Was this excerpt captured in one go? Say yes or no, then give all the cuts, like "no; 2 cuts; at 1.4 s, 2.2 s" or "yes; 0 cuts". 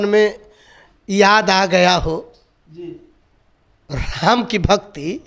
yes; 0 cuts